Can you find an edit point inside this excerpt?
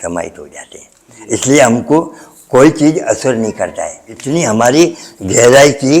yes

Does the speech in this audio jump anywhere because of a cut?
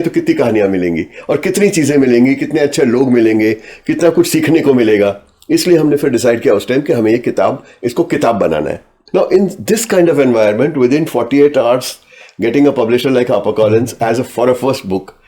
yes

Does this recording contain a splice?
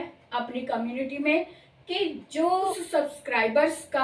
yes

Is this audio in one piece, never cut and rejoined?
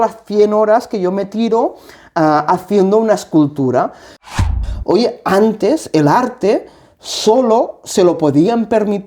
no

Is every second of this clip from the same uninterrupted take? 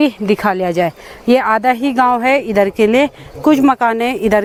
yes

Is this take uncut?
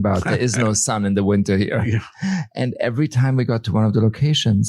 yes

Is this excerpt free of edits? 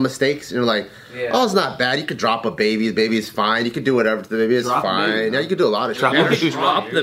no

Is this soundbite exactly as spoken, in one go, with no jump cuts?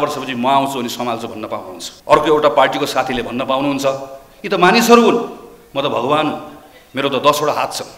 no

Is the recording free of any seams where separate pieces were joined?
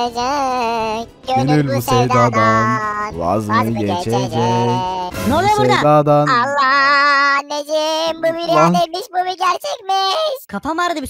yes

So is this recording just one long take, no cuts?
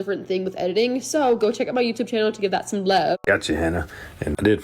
no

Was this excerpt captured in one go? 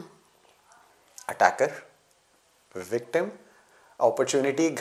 yes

